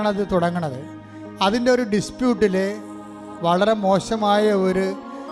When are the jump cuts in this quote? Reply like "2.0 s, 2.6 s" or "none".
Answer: none